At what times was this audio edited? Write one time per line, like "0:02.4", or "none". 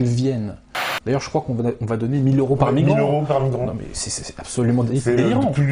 0:00.9